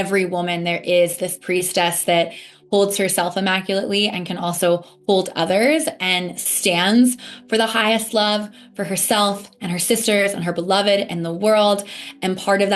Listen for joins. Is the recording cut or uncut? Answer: uncut